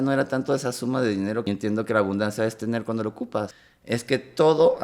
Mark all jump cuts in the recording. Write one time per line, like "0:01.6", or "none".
0:01.4
0:03.5